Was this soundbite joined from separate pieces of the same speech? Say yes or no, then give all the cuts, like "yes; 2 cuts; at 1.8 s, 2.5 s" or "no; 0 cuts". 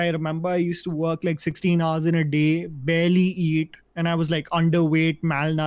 no; 0 cuts